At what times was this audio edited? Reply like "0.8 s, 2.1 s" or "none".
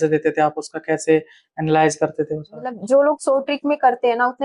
2.8 s